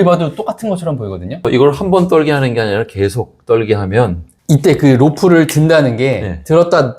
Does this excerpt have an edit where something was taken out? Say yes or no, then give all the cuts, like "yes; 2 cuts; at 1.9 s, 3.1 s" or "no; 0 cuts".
yes; 2 cuts; at 1.5 s, 4.3 s